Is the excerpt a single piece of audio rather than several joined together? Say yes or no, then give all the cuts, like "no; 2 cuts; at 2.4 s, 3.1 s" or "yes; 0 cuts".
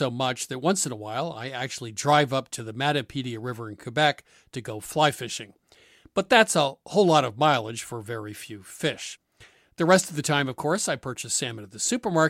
yes; 0 cuts